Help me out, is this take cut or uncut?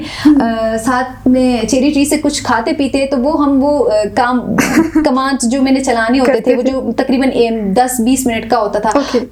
uncut